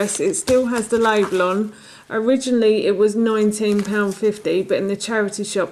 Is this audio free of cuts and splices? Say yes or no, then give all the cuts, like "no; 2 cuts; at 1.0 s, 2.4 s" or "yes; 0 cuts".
yes; 0 cuts